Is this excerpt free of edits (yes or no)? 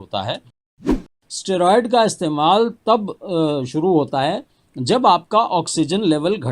no